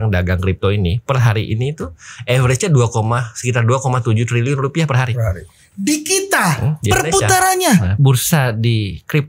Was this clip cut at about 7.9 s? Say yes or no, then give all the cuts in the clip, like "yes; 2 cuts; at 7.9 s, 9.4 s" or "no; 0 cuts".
yes; 1 cut; at 7.9 s